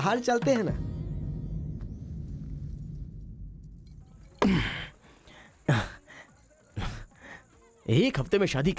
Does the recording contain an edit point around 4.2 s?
yes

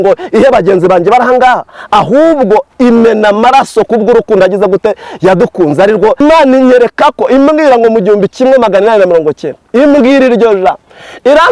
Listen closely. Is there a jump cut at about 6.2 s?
yes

